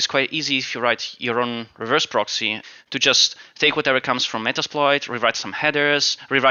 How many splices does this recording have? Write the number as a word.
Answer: zero